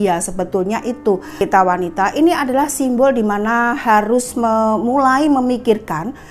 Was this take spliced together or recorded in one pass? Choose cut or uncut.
cut